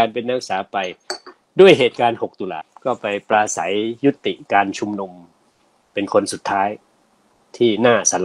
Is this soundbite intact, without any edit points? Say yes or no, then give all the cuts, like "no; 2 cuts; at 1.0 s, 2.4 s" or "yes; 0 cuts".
no; 2 cuts; at 2.7 s, 7.0 s